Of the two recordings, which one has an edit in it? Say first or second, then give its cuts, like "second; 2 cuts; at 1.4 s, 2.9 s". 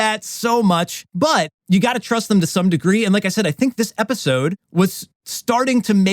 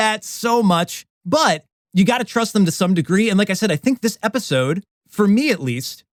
first; 2 cuts; at 1.3 s, 4.9 s